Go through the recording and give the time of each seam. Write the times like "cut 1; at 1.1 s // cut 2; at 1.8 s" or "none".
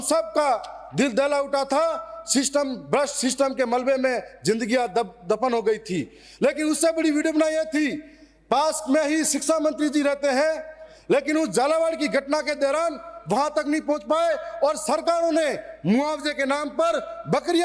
none